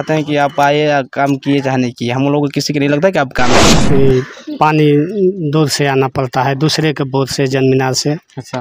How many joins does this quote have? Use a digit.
1